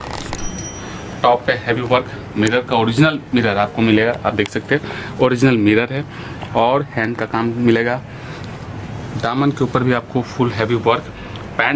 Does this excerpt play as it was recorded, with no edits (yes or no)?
yes